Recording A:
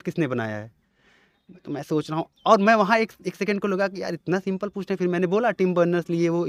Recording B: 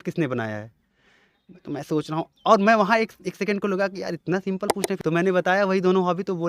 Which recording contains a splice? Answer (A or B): B